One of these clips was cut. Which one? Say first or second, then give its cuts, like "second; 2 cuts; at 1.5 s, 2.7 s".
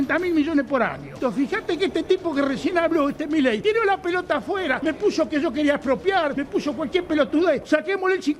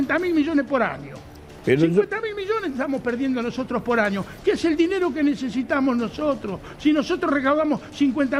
first; 5 cuts; at 1.1 s, 3.6 s, 4.8 s, 6.4 s, 7.6 s